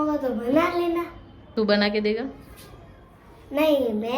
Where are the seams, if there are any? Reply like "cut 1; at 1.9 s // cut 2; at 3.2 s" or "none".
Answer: cut 1; at 1.4 s